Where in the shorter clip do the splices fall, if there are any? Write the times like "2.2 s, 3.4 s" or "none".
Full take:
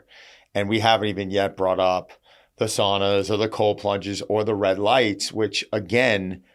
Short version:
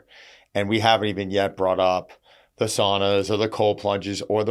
none